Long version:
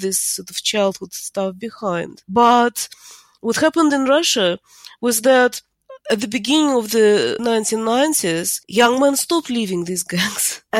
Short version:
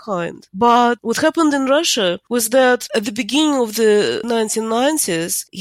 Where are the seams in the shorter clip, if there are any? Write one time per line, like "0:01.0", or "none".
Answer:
0:01.0
0:02.2
0:02.9